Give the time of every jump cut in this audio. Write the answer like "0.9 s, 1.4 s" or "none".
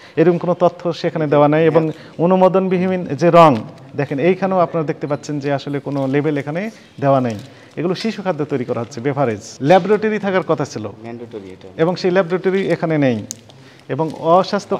9.5 s